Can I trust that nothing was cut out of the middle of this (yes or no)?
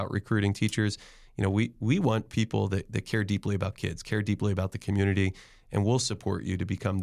yes